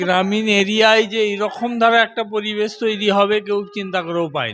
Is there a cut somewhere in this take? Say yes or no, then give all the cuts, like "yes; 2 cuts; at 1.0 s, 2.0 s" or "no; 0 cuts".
no; 0 cuts